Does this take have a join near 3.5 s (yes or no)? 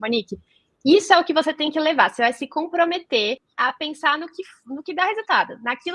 yes